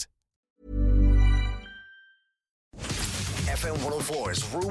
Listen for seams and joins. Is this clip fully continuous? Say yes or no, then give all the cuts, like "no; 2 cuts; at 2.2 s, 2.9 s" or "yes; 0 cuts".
no; 1 cut; at 2.8 s